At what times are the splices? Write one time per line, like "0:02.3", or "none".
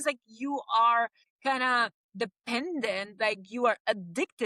0:01.3